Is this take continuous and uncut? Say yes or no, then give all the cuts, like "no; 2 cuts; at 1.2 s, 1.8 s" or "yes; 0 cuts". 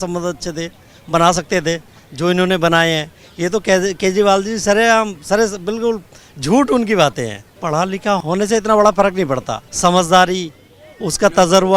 no; 3 cuts; at 7.6 s, 8.2 s, 9.6 s